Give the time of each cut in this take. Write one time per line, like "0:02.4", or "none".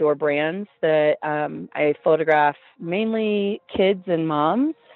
none